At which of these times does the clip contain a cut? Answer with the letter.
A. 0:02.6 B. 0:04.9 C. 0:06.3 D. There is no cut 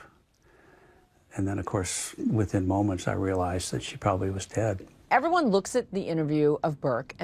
B